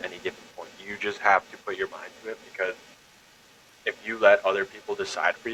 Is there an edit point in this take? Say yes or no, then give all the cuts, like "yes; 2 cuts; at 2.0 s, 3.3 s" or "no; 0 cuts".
no; 0 cuts